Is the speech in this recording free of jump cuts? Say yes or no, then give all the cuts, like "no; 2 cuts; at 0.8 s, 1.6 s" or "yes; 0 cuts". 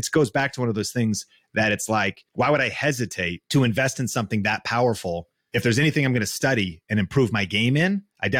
no; 3 cuts; at 2.2 s, 3.4 s, 5.3 s